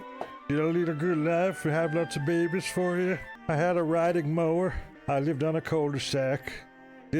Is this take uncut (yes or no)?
no